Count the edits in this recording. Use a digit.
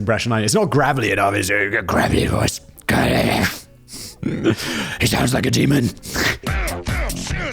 1